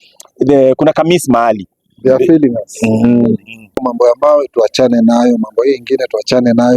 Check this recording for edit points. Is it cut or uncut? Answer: cut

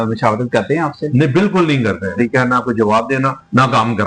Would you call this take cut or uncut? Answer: cut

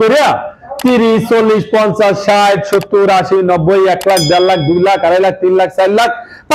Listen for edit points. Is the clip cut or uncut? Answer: uncut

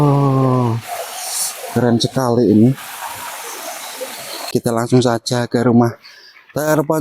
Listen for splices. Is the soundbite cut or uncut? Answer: cut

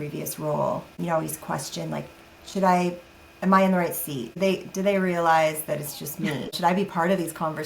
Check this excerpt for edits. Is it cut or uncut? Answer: cut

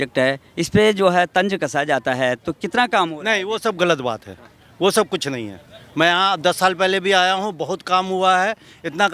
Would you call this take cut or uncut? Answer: uncut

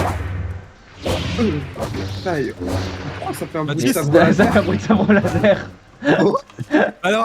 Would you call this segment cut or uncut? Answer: uncut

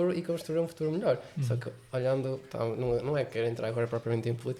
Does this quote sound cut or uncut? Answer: uncut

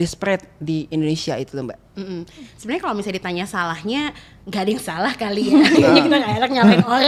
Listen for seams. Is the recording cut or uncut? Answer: uncut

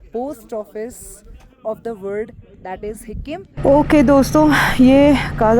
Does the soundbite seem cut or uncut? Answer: cut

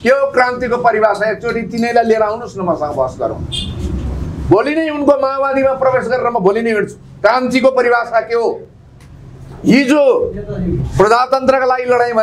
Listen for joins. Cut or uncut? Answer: uncut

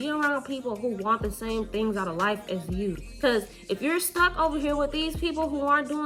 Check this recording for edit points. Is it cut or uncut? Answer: uncut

